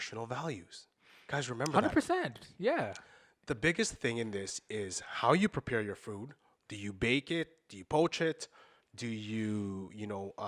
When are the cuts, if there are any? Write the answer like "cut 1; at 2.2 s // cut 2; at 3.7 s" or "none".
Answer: none